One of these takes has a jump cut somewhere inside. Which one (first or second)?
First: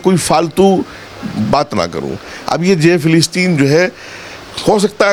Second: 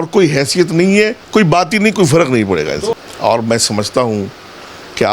second